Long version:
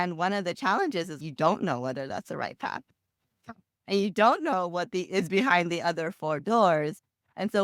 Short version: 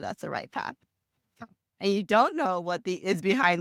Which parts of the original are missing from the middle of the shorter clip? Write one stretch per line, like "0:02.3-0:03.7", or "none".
none